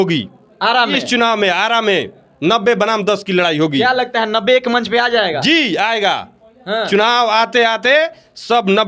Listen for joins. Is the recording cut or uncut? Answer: uncut